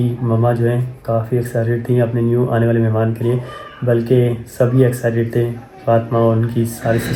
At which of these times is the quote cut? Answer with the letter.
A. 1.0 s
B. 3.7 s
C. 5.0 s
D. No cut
D